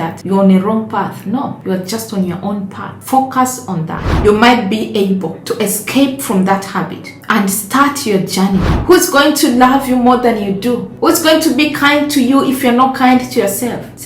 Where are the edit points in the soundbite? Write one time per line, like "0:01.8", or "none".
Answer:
0:04.1
0:08.7

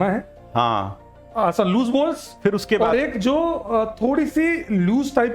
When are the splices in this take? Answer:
none

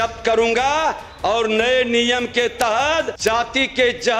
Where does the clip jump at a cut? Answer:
0:03.1

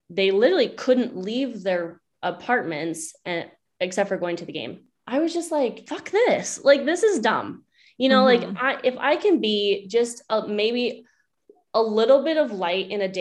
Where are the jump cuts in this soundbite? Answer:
0:04.9
0:05.9

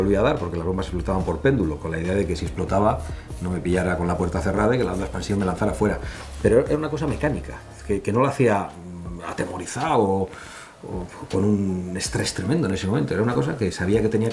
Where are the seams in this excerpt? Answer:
none

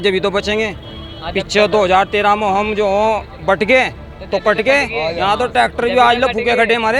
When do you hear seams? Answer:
none

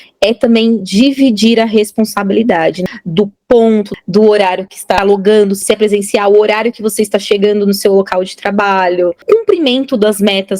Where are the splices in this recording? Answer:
0:02.8
0:03.9
0:05.0
0:05.6
0:09.2

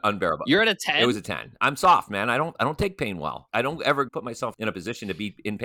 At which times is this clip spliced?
0:03.4
0:04.1

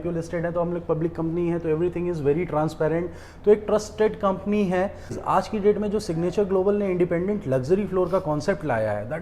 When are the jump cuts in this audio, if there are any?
0:05.2

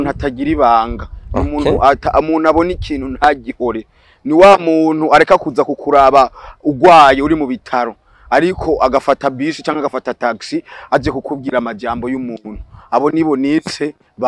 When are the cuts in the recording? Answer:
none

